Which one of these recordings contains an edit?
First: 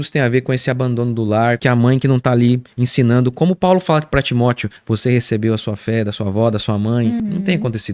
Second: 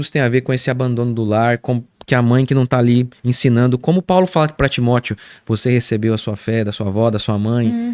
first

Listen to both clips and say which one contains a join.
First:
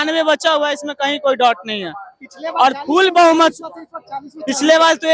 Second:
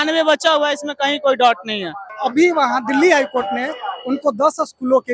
second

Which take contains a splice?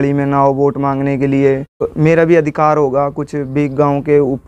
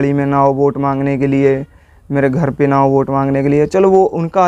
first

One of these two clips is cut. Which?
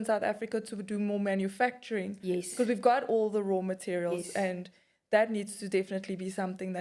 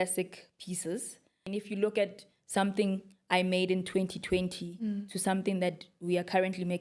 second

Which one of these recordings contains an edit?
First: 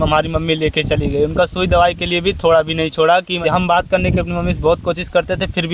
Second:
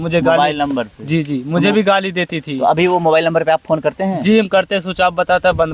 first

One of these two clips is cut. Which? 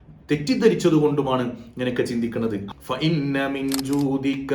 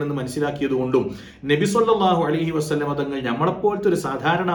first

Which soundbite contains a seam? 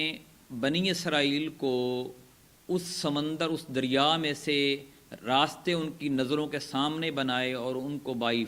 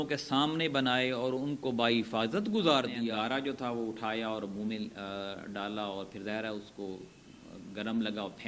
second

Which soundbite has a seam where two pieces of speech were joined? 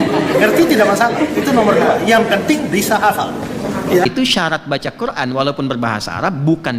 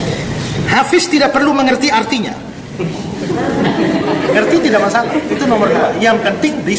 first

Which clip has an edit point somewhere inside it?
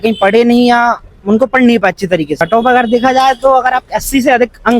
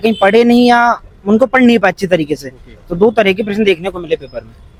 first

